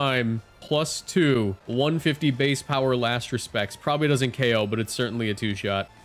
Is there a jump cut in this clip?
yes; 1 cut; at 1.6 s

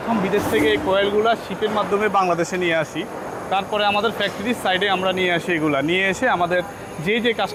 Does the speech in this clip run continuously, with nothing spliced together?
yes; 0 cuts

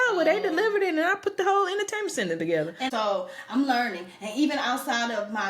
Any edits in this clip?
yes; 1 cut; at 2.8 s

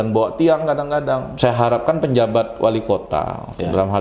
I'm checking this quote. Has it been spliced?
yes; 1 cut; at 1.3 s

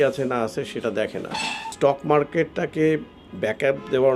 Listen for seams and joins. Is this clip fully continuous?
no; 1 cut; at 1.7 s

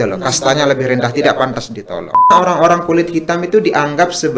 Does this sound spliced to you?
yes; 1 cut; at 2.3 s

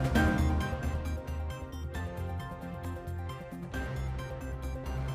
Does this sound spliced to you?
no; 0 cuts

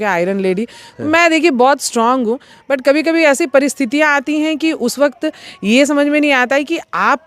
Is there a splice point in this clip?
no; 0 cuts

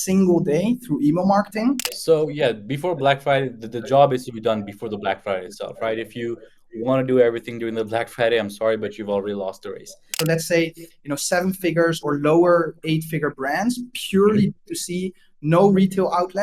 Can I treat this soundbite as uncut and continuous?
no; 2 cuts; at 1.9 s, 10.1 s

